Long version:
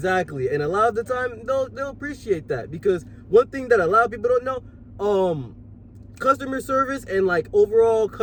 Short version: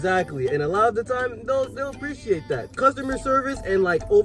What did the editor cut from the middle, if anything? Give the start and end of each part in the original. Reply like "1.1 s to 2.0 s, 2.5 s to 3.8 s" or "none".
2.7 s to 6.1 s